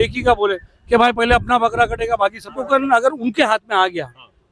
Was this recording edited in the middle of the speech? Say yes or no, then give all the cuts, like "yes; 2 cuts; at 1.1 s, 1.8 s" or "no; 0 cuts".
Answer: yes; 1 cut; at 2.6 s